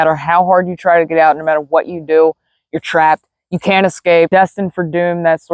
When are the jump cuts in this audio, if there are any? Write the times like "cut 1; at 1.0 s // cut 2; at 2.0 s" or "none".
cut 1; at 4.3 s